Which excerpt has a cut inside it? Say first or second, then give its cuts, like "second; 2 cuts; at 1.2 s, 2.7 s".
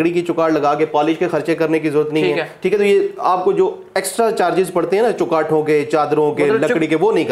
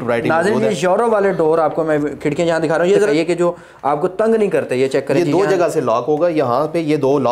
second; 1 cut; at 3.1 s